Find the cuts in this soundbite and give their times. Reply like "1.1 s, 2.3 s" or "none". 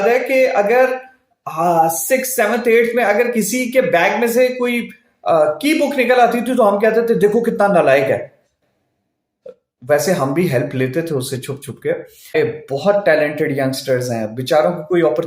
12.4 s